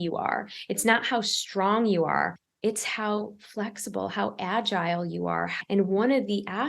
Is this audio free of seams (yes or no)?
no